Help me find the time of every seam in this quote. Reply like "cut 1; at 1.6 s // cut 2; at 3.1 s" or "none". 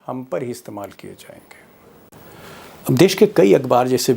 none